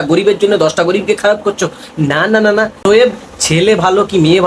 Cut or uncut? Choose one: cut